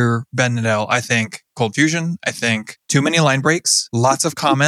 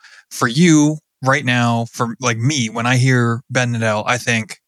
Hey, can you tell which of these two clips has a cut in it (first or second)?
first